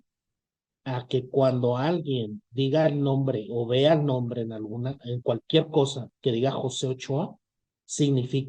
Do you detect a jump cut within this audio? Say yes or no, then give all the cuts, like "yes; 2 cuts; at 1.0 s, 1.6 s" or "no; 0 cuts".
no; 0 cuts